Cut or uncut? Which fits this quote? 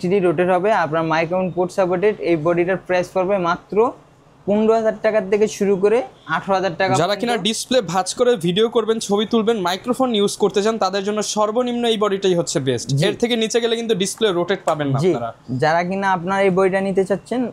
uncut